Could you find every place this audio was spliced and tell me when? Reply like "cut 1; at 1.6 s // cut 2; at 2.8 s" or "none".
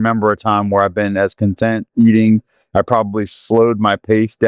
none

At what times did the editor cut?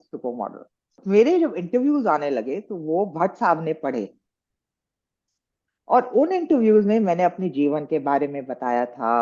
cut 1; at 1.0 s

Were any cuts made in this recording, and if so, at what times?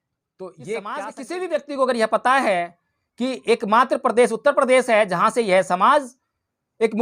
cut 1; at 1.2 s

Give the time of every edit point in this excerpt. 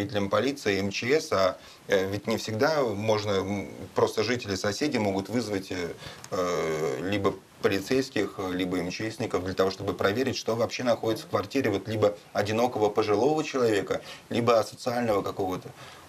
none

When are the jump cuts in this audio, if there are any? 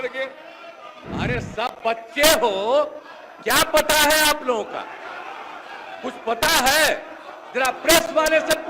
cut 1; at 0.9 s

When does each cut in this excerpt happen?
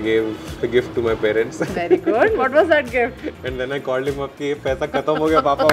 none

